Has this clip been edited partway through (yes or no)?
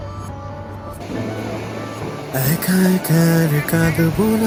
no